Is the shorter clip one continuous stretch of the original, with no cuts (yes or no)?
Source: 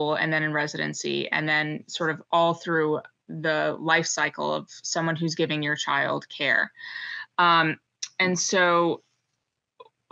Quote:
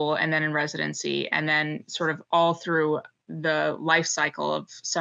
yes